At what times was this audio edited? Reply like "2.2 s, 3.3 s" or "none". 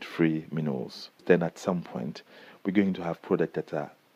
1.2 s